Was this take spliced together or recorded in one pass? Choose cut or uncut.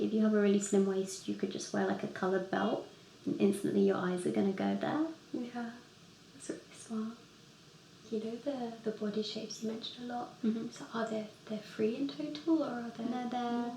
cut